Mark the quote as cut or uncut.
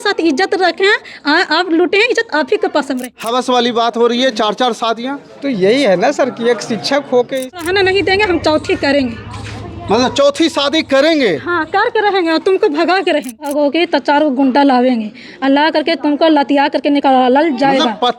cut